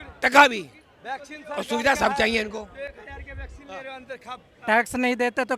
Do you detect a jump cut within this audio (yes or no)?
no